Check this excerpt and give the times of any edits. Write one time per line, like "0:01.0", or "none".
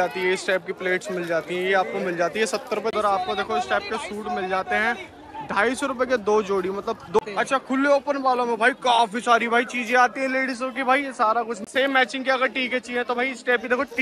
0:02.9
0:07.2
0:11.7